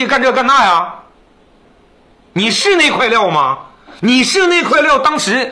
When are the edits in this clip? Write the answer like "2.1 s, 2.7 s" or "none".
none

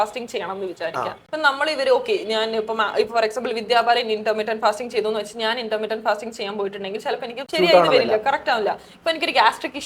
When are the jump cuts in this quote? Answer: 1.2 s, 7.4 s

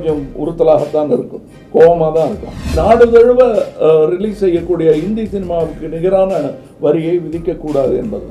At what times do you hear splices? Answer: 2.8 s

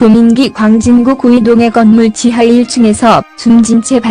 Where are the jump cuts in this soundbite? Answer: none

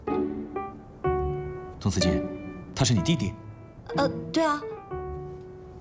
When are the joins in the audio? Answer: 1.7 s

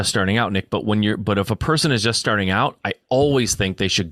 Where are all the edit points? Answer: none

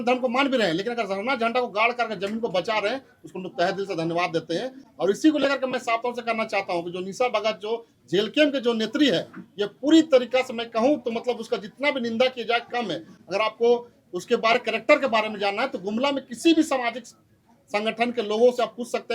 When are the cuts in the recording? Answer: none

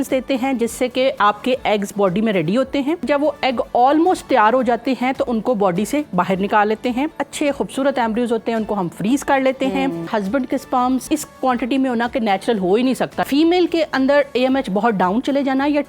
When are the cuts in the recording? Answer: 1.2 s, 3.0 s, 5.3 s, 7.2 s, 10.1 s, 11.0 s, 13.2 s

